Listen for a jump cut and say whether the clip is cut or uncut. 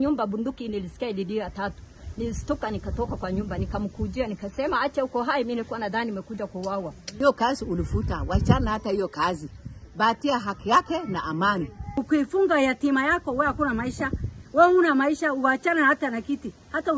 cut